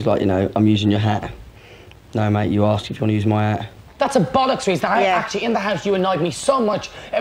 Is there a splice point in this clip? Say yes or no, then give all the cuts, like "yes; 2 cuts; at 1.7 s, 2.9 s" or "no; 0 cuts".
yes; 1 cut; at 3.9 s